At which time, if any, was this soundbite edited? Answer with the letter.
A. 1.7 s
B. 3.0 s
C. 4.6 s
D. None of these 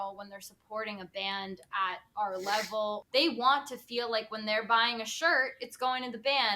B